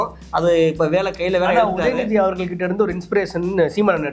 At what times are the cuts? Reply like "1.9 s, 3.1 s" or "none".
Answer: none